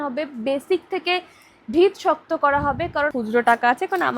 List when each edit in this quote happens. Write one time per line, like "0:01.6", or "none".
0:03.1

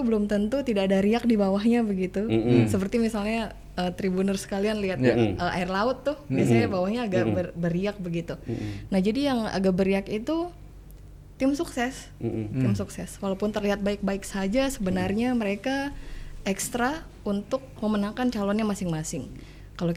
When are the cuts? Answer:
none

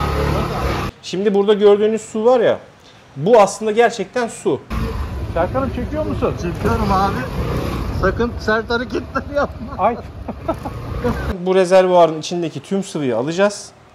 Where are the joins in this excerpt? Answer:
0:00.9
0:04.7
0:11.4

